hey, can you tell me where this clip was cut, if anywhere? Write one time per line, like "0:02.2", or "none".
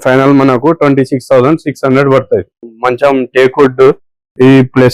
0:02.5